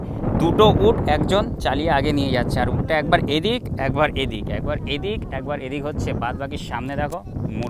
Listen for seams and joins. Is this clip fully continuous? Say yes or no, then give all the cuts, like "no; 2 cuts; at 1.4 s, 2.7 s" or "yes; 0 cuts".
yes; 0 cuts